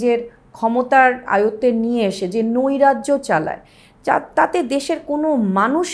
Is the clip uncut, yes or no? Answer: yes